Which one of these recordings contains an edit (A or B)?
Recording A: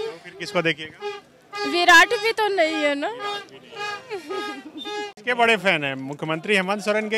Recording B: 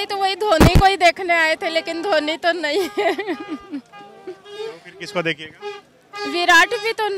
A